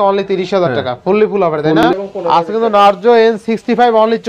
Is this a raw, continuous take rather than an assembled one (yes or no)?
no